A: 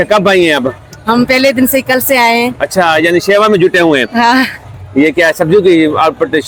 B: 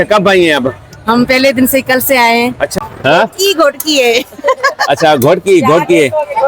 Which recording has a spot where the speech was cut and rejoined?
B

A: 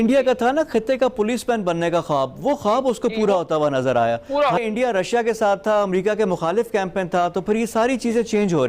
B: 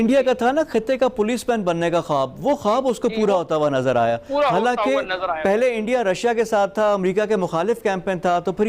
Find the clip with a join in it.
A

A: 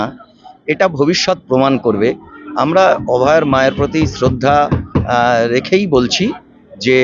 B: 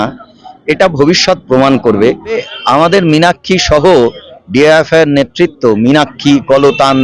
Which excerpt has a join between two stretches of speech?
B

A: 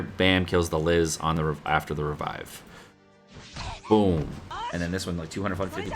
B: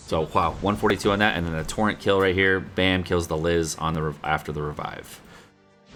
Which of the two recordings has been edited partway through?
A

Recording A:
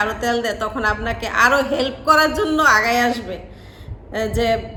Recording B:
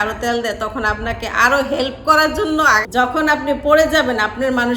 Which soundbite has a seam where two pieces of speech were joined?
B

